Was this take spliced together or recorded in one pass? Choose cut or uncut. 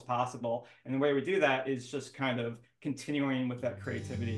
uncut